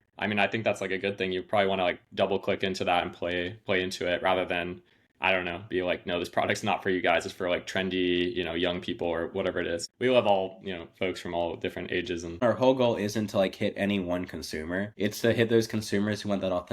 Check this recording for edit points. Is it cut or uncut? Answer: cut